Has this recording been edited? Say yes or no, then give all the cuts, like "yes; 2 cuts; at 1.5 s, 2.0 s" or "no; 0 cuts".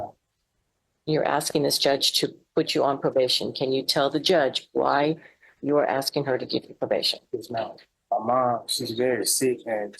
yes; 1 cut; at 7.9 s